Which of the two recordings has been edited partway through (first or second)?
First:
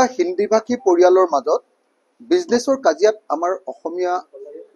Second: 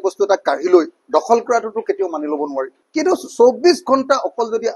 second